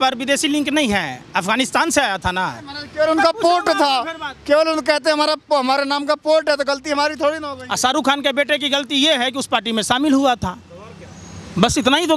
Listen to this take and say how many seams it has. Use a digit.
0